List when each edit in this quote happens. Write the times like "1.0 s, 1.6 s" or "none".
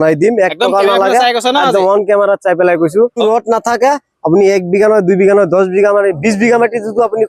3.2 s